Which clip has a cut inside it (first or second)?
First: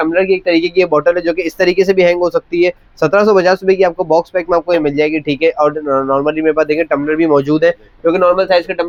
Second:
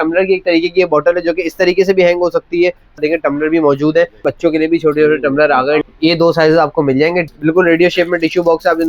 second